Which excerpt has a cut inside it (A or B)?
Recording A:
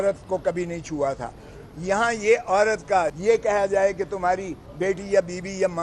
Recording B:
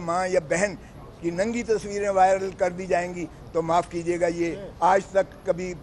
A